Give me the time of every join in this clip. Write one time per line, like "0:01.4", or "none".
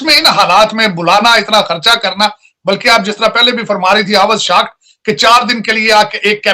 none